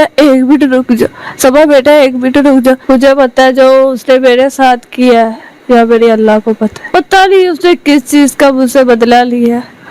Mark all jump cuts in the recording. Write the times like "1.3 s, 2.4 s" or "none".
2.8 s, 6.9 s